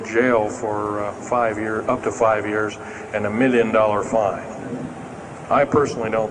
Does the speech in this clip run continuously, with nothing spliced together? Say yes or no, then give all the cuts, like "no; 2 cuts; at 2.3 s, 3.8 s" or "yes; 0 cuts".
yes; 0 cuts